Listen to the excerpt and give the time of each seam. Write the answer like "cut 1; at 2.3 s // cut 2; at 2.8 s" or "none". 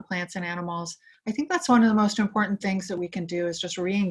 cut 1; at 1.1 s